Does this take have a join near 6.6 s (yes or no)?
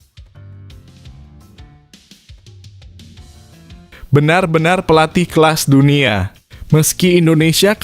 no